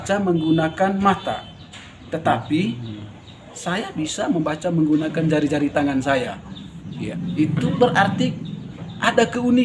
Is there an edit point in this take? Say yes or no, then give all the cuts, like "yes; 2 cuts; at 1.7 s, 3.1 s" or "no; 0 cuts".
no; 0 cuts